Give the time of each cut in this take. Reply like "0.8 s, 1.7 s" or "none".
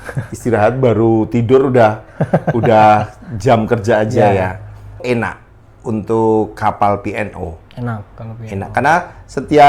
5.0 s